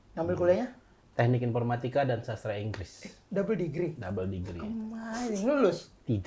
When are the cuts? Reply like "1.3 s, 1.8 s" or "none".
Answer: 0.9 s